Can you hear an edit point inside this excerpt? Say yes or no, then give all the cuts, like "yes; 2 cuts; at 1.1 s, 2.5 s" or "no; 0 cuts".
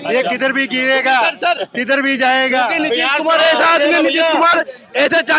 no; 0 cuts